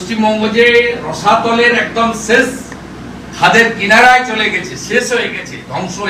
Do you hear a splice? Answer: no; 0 cuts

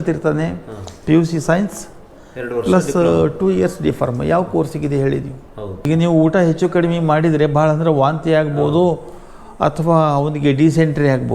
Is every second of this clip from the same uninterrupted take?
no; 1 cut; at 5.9 s

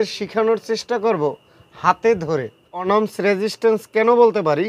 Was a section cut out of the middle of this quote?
yes; 1 cut; at 2.9 s

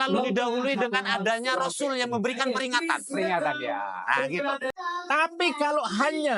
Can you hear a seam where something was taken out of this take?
yes; 1 cut; at 4.7 s

